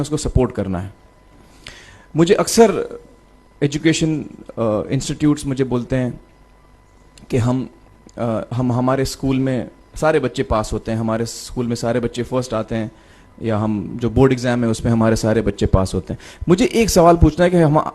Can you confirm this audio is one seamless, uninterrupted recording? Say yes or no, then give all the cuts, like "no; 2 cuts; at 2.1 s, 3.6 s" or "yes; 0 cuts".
yes; 0 cuts